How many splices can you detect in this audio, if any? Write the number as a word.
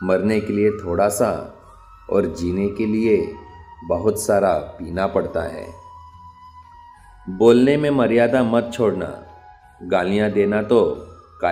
zero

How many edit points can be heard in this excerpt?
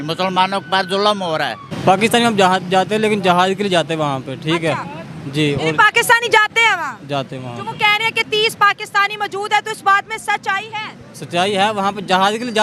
one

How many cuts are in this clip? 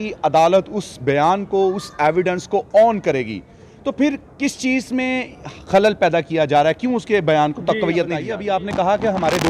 one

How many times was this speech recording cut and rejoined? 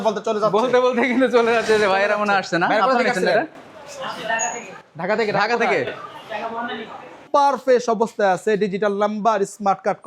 one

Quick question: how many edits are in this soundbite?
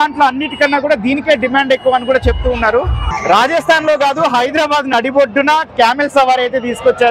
one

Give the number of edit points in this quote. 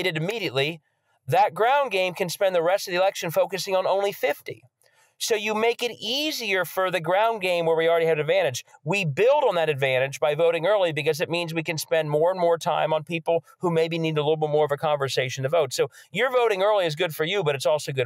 zero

